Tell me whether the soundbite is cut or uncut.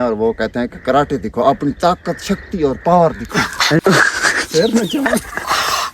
cut